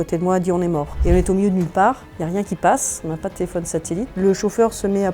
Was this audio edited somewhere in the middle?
yes; 3 cuts; at 0.9 s, 2.1 s, 4.1 s

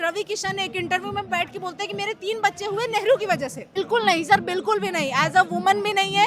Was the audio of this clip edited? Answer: yes; 1 cut; at 3.7 s

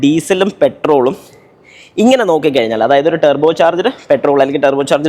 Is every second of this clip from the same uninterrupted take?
yes; 0 cuts

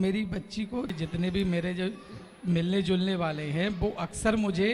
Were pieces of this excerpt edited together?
yes; 1 cut; at 1.0 s

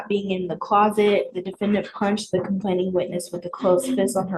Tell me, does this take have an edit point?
no; 0 cuts

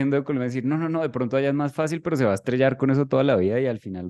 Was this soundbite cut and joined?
no; 0 cuts

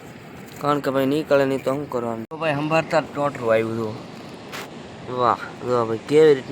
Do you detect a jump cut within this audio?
yes; 1 cut; at 2.2 s

